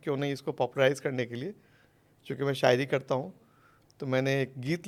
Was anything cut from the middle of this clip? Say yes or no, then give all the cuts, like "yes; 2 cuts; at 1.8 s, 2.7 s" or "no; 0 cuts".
no; 0 cuts